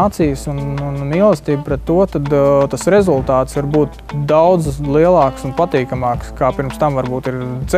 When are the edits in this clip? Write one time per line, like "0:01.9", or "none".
0:03.5